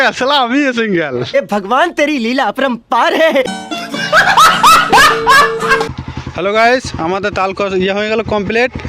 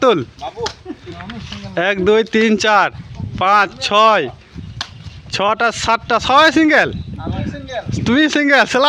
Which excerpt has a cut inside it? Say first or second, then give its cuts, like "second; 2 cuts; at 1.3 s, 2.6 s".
first; 3 cuts; at 1.4 s, 3.6 s, 5.9 s